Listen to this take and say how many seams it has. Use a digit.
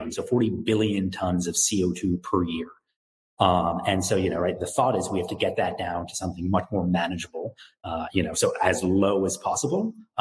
0